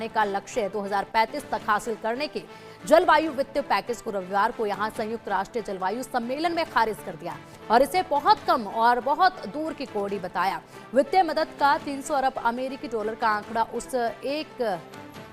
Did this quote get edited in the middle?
no; 0 cuts

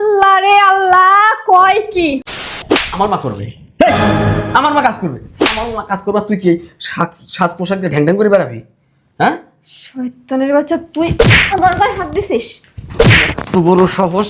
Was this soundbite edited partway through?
yes; 1 cut; at 2.6 s

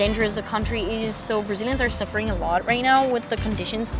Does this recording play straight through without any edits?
yes; 0 cuts

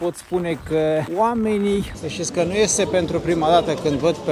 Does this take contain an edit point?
yes; 2 cuts; at 1.1 s, 2.0 s

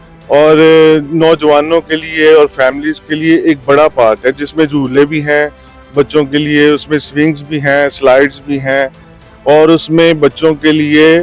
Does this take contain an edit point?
no; 0 cuts

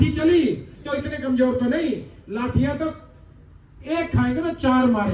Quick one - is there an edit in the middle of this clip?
no; 0 cuts

